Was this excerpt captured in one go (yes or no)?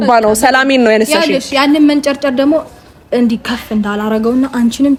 yes